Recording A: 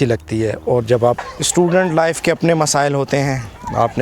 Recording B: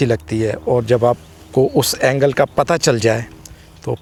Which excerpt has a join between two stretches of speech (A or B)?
A